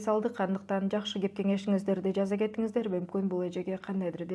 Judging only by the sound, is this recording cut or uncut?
uncut